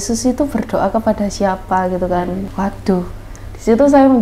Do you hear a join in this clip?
yes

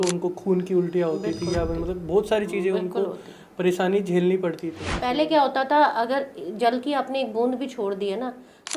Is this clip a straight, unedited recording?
no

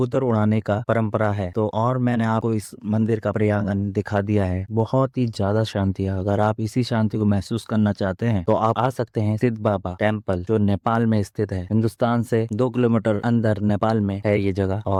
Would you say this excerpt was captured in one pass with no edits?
yes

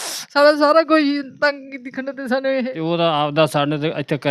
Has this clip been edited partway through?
yes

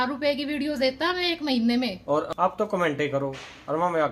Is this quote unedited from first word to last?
no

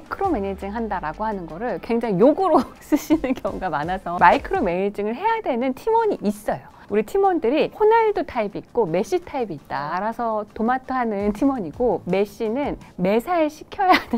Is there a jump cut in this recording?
yes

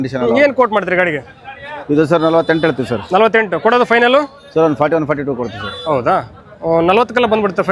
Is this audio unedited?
yes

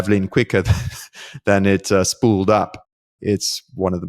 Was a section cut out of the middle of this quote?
no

